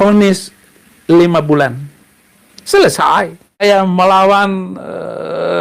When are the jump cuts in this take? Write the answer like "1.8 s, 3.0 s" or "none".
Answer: 3.6 s